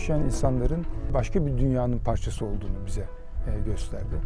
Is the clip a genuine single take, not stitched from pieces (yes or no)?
no